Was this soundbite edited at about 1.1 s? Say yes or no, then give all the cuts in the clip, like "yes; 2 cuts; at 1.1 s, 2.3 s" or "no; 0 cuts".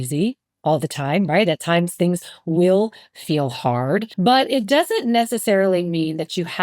no; 1 cut; at 4.1 s